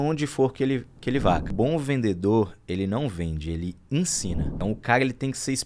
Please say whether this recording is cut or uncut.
cut